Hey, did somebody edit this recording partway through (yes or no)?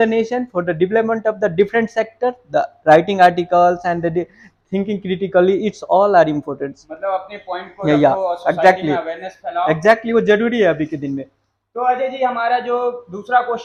no